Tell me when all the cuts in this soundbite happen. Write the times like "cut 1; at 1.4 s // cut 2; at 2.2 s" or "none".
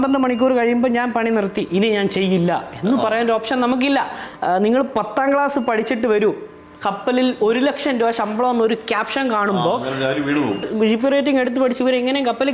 cut 1; at 4.2 s // cut 2; at 10.6 s